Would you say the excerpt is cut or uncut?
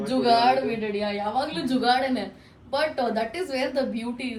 uncut